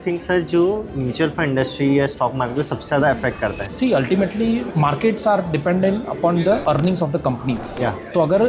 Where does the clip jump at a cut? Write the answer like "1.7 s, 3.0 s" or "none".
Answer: 3.7 s, 6.6 s